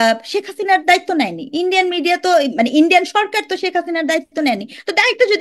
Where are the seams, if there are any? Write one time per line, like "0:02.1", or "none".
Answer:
none